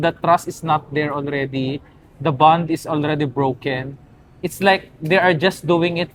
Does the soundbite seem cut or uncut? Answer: uncut